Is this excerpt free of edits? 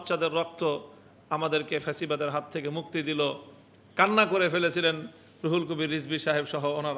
yes; 0 cuts

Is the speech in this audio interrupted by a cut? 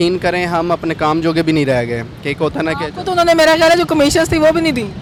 no; 0 cuts

